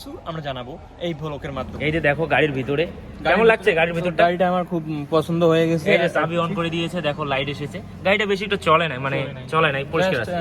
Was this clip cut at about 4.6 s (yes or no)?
no